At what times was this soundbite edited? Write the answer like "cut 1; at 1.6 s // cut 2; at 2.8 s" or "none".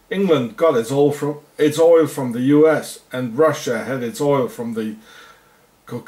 cut 1; at 5.0 s

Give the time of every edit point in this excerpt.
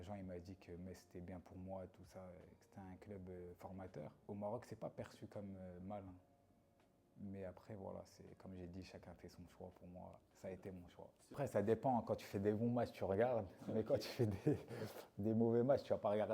cut 1; at 4.2 s // cut 2; at 11.4 s

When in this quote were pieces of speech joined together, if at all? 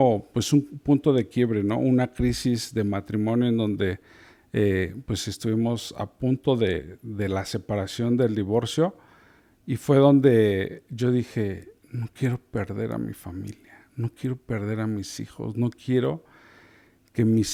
none

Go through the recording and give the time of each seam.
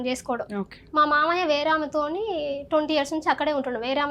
none

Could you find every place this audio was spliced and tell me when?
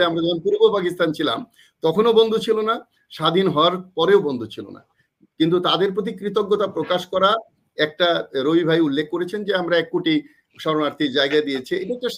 none

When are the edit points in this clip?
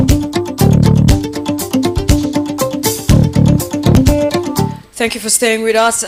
none

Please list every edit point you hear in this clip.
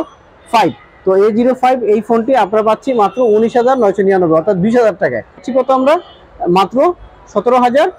cut 1; at 5.5 s

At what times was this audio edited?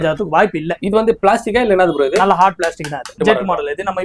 cut 1; at 3.1 s

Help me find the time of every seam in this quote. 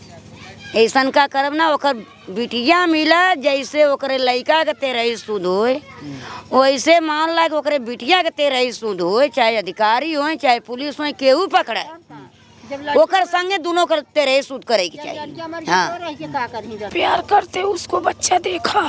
cut 1; at 16.9 s

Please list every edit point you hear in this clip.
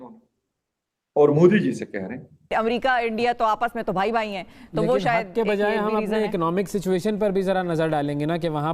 cut 1; at 2.5 s

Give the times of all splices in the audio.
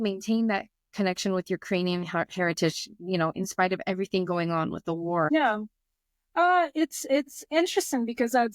cut 1; at 5.3 s

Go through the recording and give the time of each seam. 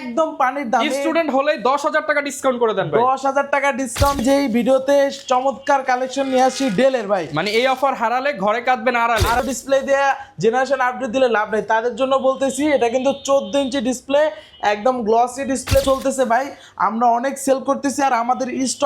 cut 1; at 4.2 s // cut 2; at 9.4 s // cut 3; at 15.8 s

